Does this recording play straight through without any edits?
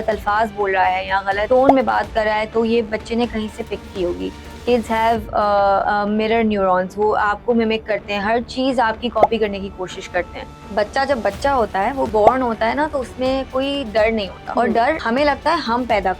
no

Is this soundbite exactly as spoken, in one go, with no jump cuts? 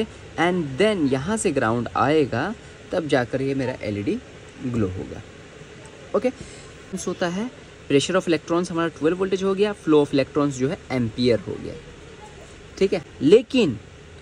no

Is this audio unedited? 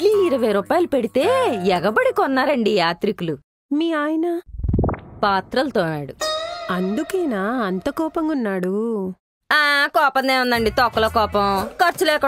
yes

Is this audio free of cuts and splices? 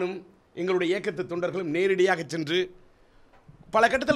yes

